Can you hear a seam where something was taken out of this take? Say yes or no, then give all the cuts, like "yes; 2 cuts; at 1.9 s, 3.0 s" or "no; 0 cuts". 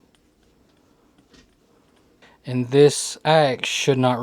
yes; 1 cut; at 2.2 s